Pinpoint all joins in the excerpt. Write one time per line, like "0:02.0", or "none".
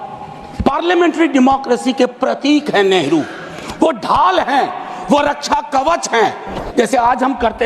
0:06.6